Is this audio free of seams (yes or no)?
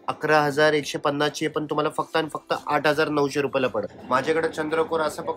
no